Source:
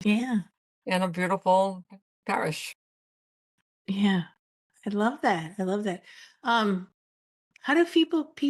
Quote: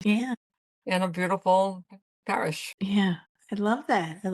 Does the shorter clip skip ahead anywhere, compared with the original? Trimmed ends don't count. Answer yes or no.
yes